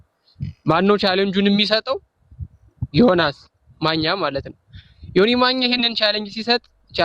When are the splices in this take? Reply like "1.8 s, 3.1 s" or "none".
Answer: none